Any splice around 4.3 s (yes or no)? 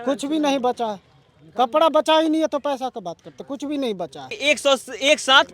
yes